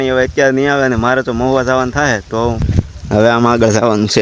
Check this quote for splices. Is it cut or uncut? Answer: cut